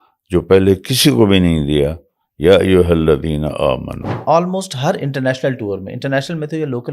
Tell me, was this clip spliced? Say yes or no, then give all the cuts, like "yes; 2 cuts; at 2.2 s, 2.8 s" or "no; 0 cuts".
yes; 1 cut; at 4.1 s